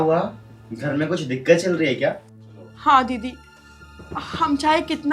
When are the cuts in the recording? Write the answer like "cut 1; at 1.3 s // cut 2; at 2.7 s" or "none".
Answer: none